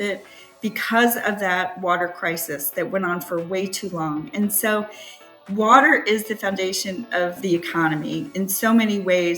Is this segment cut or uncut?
cut